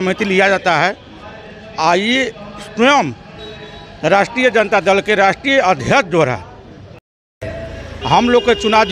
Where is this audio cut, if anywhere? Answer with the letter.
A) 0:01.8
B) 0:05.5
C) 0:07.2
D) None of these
C